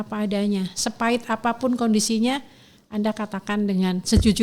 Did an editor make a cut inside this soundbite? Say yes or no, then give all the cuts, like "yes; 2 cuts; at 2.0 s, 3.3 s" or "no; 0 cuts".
no; 0 cuts